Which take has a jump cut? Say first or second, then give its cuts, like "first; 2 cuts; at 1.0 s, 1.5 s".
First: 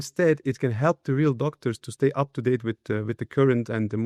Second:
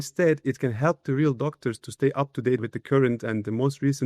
second; 1 cut; at 2.6 s